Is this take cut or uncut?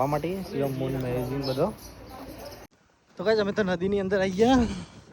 cut